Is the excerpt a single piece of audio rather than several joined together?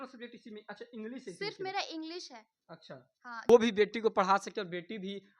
no; 1 cut; at 3.5 s

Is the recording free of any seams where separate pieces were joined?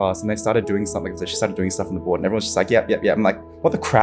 no; 1 cut; at 1.2 s

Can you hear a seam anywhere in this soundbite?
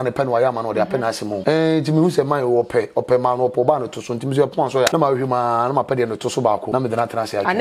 yes; 3 cuts; at 1.4 s, 4.9 s, 6.6 s

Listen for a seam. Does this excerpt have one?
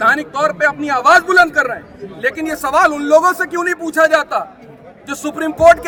no; 0 cuts

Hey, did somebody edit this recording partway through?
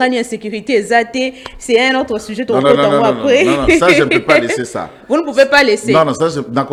no; 0 cuts

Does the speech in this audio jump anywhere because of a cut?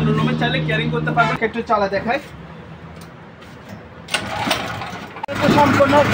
yes; 2 cuts; at 1.4 s, 5.2 s

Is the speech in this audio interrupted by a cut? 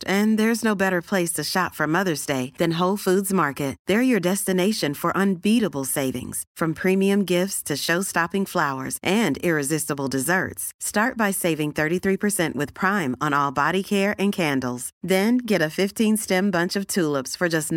no; 0 cuts

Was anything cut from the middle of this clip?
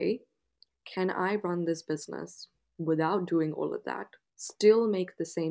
no; 0 cuts

